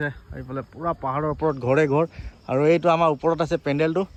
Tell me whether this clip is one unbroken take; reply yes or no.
yes